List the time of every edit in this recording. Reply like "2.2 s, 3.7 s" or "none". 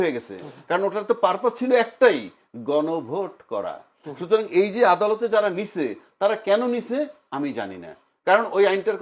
none